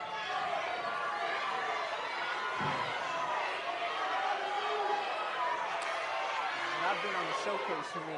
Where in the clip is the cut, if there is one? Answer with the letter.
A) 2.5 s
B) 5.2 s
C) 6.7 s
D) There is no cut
D